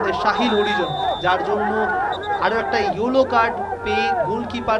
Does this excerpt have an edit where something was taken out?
no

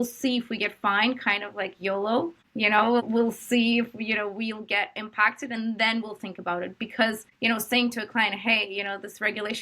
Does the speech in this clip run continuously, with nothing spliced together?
no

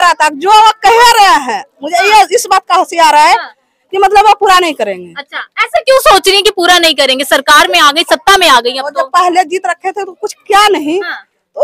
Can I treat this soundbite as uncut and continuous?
yes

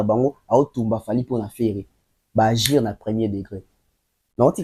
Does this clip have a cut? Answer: no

